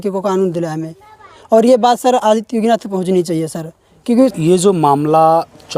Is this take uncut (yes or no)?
yes